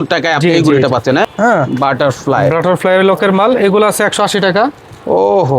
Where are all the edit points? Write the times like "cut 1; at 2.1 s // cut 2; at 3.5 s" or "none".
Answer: cut 1; at 1.2 s